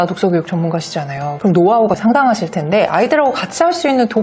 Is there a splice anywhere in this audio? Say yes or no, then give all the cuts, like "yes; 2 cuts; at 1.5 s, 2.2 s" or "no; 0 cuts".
yes; 1 cut; at 2.0 s